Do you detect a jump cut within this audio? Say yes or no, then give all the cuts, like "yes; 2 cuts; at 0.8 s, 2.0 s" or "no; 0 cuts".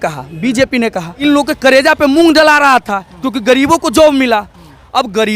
yes; 1 cut; at 1.2 s